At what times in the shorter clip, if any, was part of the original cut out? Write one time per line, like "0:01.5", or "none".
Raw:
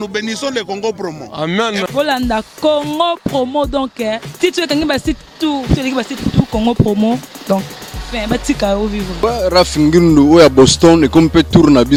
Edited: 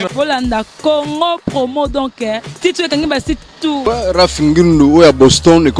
0:03.8